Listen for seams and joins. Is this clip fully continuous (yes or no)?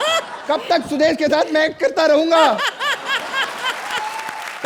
yes